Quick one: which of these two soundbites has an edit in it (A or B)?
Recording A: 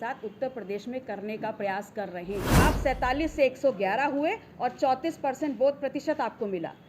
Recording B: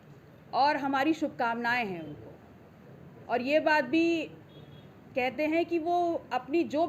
A